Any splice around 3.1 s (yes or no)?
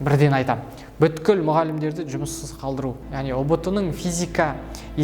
yes